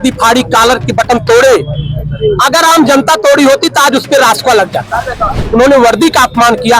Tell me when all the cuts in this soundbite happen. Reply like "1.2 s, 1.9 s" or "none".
5.4 s

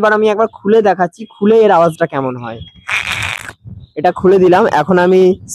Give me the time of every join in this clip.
none

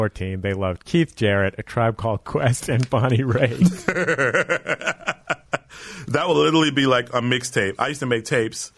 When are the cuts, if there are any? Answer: none

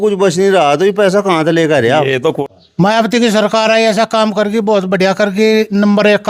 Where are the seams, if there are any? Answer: 2.4 s

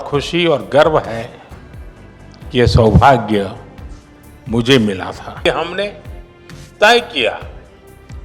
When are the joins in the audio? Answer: 5.5 s

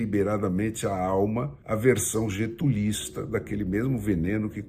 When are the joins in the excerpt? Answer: 1.6 s

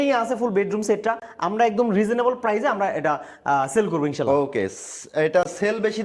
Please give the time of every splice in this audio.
none

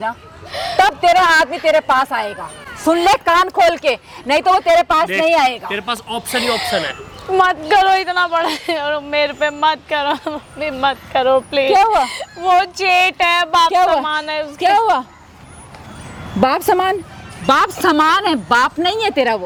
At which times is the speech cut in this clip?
none

